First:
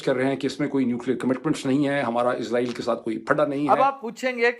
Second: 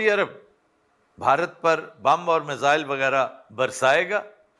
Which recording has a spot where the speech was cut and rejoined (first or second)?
first